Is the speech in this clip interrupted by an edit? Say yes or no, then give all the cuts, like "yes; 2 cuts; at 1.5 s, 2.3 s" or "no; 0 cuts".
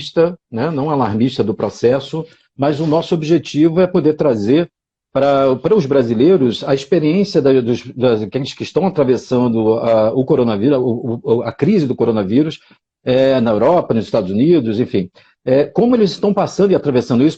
no; 0 cuts